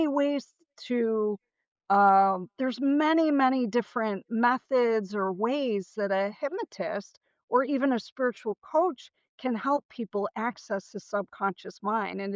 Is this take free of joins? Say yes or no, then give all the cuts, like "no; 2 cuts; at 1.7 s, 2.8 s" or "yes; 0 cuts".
yes; 0 cuts